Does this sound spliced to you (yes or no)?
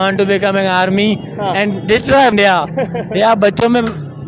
yes